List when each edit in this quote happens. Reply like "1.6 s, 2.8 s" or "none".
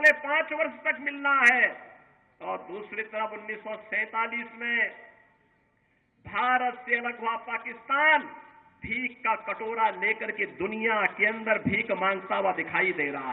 none